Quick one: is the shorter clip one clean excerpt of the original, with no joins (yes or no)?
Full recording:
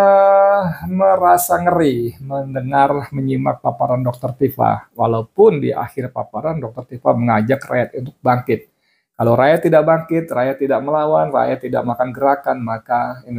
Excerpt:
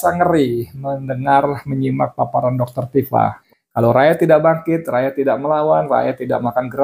no